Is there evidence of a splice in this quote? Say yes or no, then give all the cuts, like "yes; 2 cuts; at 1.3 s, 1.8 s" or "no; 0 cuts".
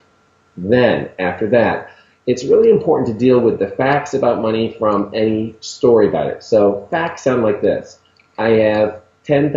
yes; 1 cut; at 3.6 s